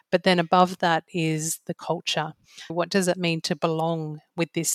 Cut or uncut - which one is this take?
cut